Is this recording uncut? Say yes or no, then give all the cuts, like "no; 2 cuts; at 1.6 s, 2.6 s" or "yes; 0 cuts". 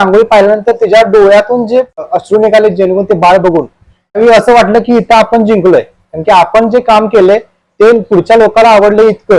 no; 2 cuts; at 2.1 s, 4.2 s